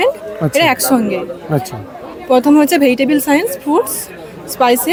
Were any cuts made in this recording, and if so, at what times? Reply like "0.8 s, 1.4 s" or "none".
none